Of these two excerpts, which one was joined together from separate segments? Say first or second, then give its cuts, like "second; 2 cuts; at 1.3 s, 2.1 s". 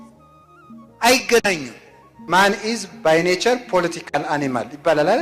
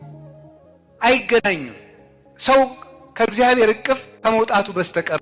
first; 1 cut; at 2.2 s